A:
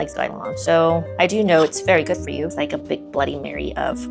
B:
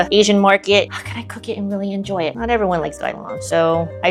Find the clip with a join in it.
A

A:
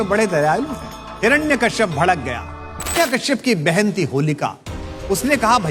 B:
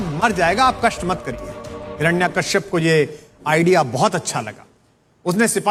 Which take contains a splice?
A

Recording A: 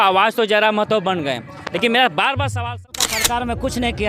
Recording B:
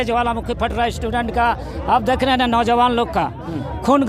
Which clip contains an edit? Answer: A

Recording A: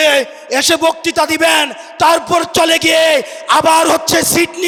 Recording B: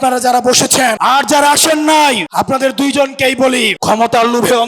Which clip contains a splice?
B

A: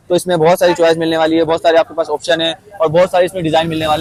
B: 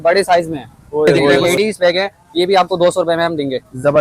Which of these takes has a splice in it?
B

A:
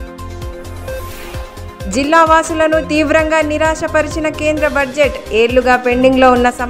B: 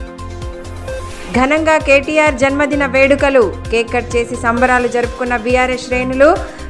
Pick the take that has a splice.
B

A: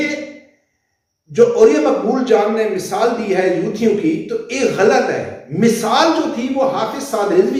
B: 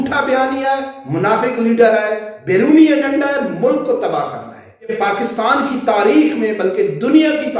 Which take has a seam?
B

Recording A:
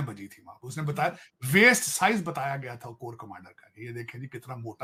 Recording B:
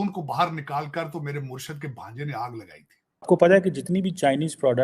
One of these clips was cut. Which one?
B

